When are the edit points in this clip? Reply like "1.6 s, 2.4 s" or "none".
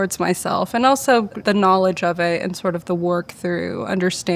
1.4 s